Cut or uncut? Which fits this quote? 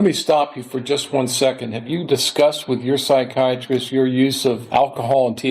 cut